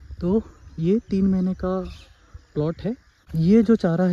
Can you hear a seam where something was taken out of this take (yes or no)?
yes